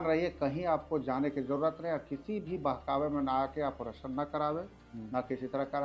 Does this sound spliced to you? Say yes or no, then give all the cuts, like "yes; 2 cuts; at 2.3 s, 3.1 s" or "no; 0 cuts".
no; 0 cuts